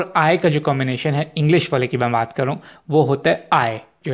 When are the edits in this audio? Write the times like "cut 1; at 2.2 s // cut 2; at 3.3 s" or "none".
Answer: none